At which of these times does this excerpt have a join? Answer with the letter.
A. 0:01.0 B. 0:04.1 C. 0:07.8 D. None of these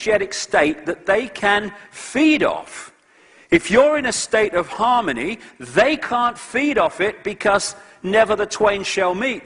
A